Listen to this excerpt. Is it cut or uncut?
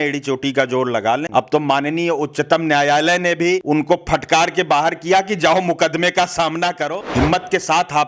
cut